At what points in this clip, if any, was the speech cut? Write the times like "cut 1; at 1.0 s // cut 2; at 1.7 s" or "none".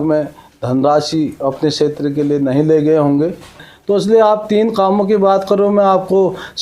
cut 1; at 3.6 s